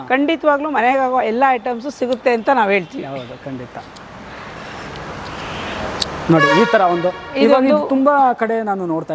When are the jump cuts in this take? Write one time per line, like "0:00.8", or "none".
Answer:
none